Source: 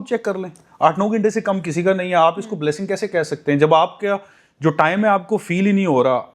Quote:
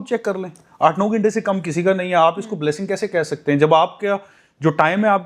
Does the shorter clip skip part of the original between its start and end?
no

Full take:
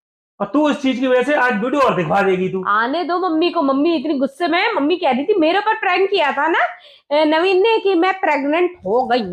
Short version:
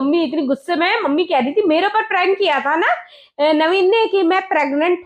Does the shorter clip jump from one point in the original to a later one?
no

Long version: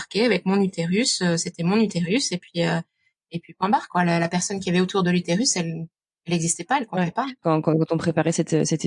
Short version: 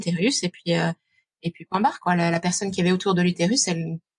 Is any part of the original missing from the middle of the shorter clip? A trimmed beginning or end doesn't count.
no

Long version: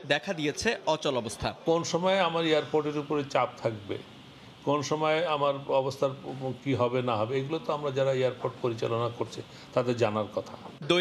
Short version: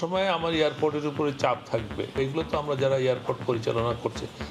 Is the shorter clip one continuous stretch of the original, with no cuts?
no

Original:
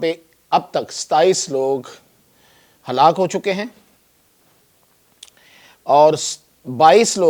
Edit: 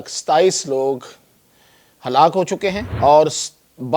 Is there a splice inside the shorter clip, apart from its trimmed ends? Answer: yes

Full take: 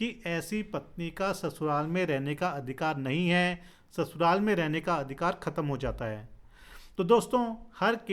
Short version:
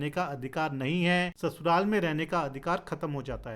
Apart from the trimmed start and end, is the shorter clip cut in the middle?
yes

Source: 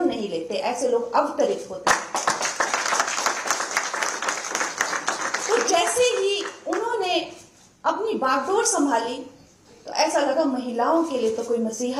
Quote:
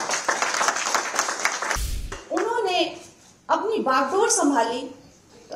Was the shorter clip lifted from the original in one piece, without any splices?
no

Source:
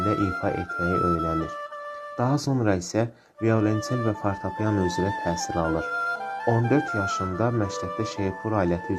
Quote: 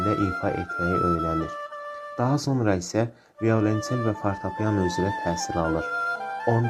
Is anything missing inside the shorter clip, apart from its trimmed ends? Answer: no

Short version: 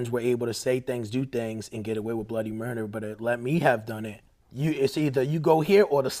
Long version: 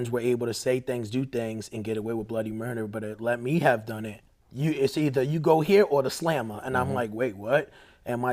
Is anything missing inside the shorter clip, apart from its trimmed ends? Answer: no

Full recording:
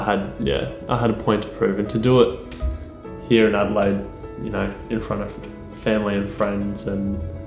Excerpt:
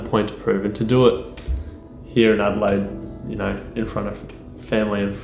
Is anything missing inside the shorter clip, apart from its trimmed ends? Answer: no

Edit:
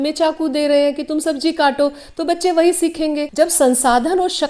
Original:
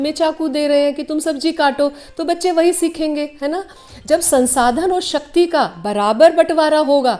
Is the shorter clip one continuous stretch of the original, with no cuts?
no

